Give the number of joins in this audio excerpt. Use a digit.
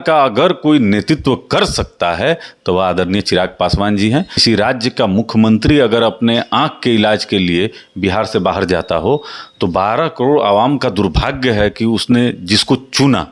1